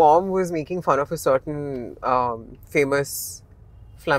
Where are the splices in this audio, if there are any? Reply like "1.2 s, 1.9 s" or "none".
none